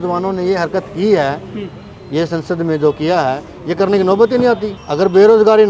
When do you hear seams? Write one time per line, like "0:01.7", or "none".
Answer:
0:04.8

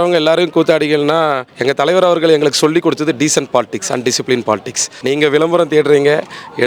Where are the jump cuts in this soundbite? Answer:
0:01.5
0:04.9

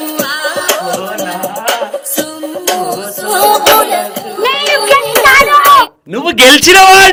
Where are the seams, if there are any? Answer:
none

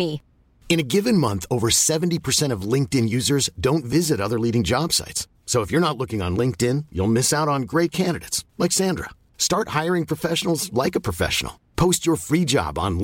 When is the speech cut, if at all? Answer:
none

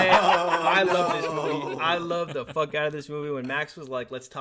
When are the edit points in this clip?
none

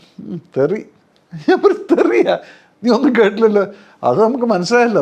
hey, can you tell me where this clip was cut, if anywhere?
none

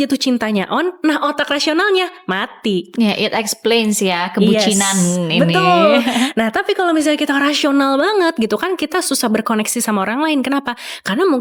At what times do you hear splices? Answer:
none

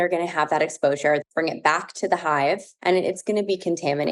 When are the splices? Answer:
0:01.2
0:02.7

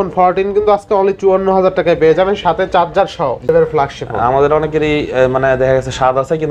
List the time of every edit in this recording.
0:03.5

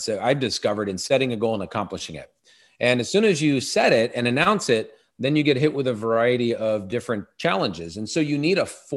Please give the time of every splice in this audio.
none

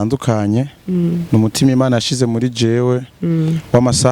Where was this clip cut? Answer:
none

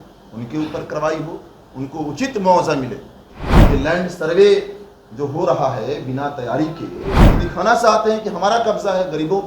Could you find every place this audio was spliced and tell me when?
0:03.5
0:07.3

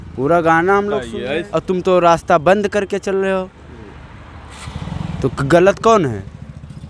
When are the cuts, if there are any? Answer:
0:01.4

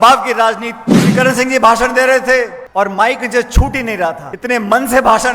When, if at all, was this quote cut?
0:01.1
0:02.6
0:04.3

